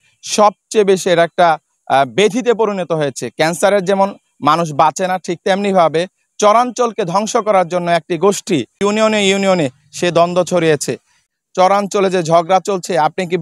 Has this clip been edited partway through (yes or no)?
yes